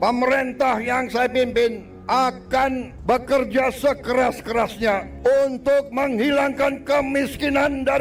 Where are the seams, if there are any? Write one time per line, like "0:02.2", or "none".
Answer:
0:01.9
0:02.9
0:05.1